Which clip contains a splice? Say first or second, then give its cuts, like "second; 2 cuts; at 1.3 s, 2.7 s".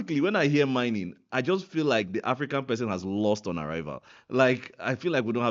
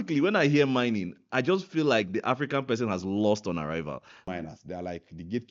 second; 1 cut; at 4.2 s